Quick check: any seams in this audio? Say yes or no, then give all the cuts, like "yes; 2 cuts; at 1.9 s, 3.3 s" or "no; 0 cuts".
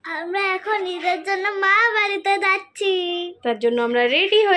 no; 0 cuts